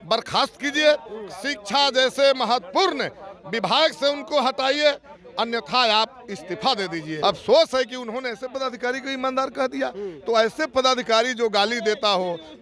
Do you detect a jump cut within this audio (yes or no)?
yes